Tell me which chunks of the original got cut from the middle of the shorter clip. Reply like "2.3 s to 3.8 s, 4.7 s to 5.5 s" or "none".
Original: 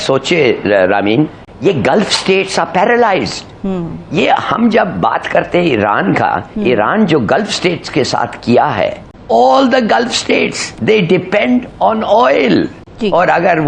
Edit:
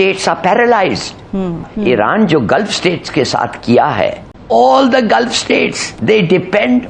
4.0 s to 6.5 s